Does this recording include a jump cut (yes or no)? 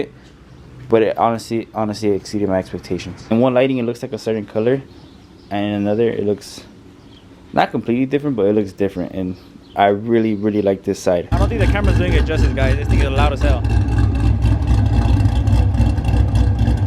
yes